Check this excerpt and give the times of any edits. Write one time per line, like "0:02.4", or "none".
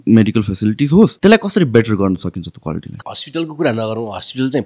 0:01.1
0:02.9